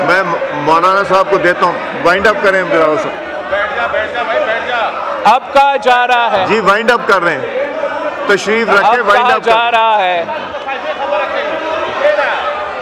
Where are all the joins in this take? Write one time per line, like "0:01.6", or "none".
none